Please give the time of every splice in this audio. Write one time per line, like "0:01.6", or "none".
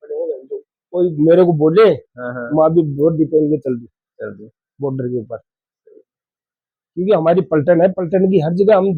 none